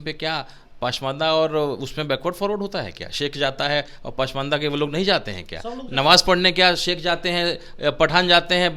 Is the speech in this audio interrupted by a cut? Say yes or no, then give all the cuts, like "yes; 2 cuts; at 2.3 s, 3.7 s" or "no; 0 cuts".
no; 0 cuts